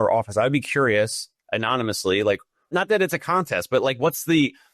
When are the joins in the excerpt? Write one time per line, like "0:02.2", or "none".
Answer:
0:02.6